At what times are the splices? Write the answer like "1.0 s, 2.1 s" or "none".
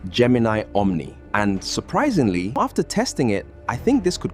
1.2 s, 2.6 s